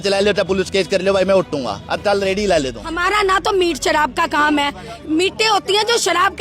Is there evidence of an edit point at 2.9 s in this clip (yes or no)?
yes